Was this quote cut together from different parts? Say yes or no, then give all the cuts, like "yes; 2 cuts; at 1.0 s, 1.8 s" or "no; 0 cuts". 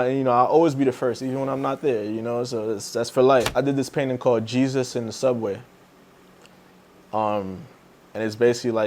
yes; 1 cut; at 3.5 s